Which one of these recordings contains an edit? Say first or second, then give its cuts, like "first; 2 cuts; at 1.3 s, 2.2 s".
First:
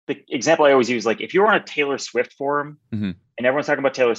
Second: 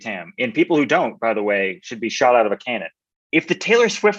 second; 1 cut; at 3.2 s